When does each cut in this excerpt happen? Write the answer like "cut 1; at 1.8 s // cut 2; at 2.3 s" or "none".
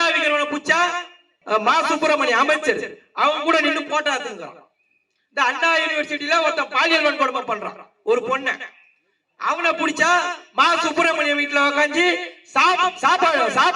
cut 1; at 1.3 s

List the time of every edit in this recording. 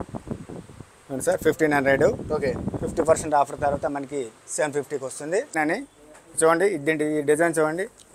cut 1; at 5.6 s

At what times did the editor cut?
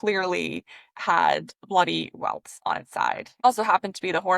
cut 1; at 3.4 s

